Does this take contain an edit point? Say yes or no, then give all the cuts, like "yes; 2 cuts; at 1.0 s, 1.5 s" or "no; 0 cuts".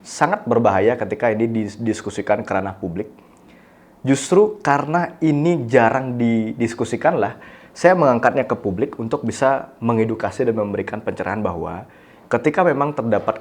no; 0 cuts